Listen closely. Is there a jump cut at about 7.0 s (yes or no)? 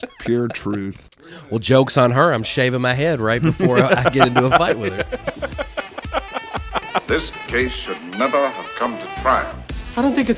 yes